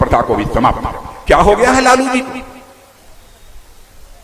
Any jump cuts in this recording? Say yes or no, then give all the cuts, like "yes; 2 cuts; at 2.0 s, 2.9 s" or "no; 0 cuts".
yes; 1 cut; at 1.1 s